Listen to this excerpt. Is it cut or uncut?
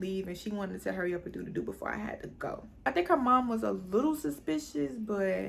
uncut